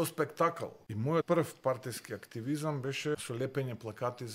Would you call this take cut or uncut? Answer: cut